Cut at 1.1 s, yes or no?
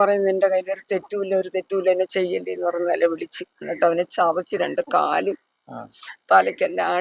no